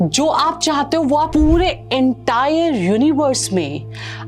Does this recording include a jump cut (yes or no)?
yes